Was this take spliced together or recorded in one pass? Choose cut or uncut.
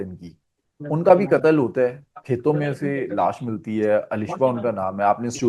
uncut